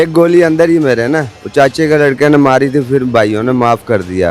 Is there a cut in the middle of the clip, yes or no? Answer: yes